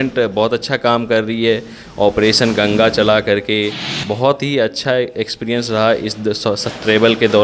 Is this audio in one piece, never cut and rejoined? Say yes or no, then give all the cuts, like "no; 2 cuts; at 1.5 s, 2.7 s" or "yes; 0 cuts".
yes; 0 cuts